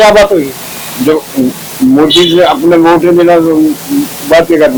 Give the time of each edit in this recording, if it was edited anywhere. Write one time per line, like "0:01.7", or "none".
none